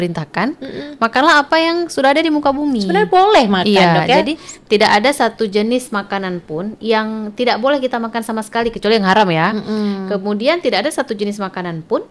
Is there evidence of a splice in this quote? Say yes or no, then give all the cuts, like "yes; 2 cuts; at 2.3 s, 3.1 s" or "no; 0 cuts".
no; 0 cuts